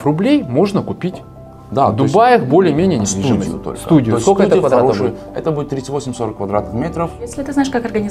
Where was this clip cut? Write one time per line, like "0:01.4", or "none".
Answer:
0:07.2